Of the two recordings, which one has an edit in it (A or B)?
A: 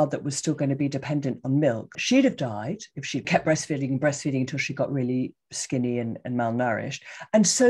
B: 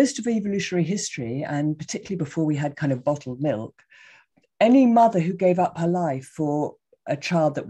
A